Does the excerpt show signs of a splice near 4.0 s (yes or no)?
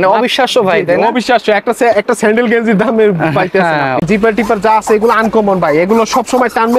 yes